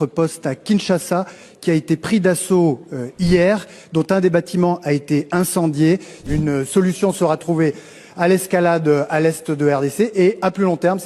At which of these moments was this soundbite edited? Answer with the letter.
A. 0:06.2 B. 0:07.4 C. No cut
A